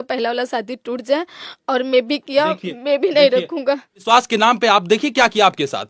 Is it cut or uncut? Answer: cut